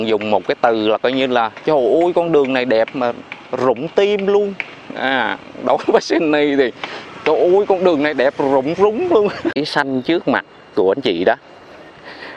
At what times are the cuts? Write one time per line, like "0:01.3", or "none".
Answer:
0:09.6